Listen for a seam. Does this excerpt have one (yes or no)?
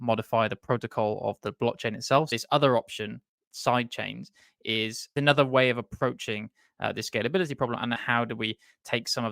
yes